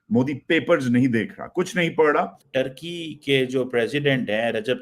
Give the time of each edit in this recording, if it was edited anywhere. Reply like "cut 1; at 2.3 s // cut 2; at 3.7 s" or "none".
cut 1; at 2.4 s